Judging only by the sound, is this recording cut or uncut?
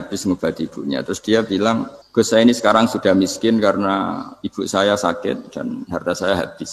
cut